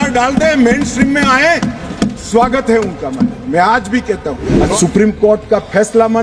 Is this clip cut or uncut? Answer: cut